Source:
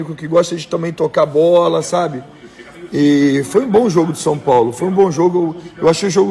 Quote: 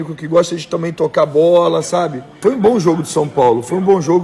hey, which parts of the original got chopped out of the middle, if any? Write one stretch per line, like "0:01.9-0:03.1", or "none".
0:02.4-0:03.5